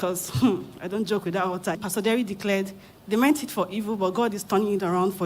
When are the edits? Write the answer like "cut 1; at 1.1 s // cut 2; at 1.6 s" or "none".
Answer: cut 1; at 1.8 s